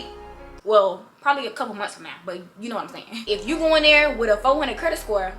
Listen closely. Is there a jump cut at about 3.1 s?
yes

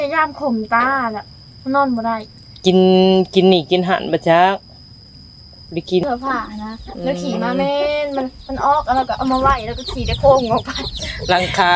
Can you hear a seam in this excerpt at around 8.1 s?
no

